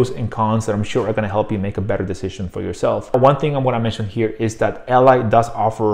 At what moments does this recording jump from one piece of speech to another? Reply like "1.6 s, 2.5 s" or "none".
3.1 s